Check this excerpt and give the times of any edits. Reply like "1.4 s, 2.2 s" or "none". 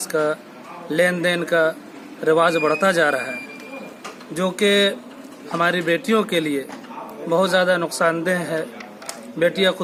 none